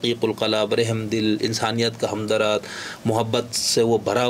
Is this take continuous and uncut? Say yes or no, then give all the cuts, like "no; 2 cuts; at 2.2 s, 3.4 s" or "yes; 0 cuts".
yes; 0 cuts